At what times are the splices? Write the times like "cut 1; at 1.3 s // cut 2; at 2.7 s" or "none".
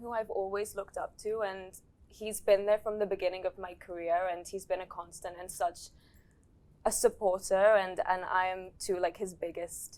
none